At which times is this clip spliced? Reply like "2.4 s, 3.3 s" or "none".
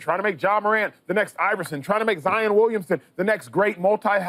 none

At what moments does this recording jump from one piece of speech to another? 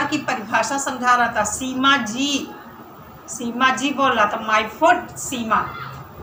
none

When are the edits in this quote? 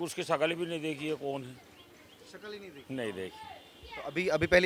none

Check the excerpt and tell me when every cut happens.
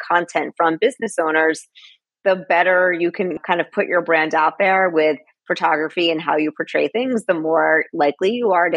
none

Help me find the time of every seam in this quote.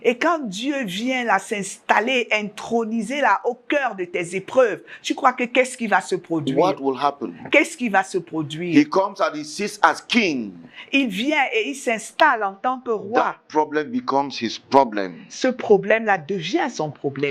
none

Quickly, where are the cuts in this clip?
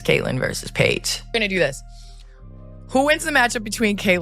1.3 s

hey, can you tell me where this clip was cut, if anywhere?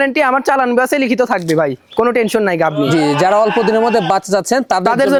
none

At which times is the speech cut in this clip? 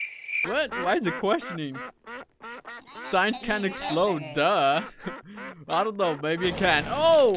none

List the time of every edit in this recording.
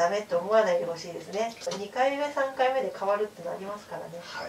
1.7 s

